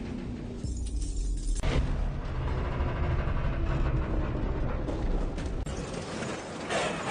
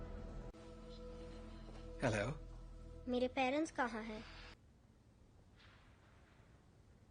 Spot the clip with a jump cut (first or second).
second